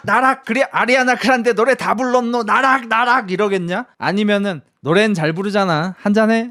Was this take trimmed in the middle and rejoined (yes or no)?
no